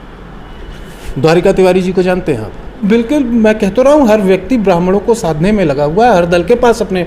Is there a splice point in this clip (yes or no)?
yes